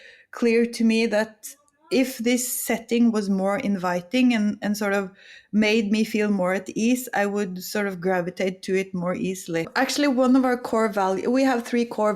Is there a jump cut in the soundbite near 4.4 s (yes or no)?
no